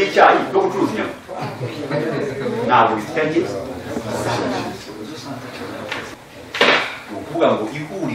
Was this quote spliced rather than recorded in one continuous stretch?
yes; 1 cut; at 6.1 s

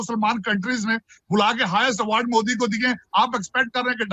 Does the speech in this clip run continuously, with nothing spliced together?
yes; 0 cuts

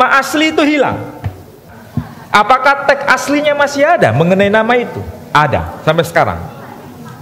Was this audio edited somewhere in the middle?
yes; 1 cut; at 1.8 s

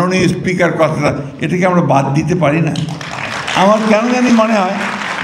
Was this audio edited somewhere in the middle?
no; 0 cuts

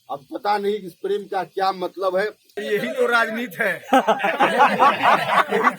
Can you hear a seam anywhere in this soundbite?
yes; 1 cut; at 2.5 s

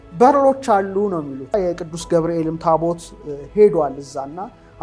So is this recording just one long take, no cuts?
no; 1 cut; at 1.5 s

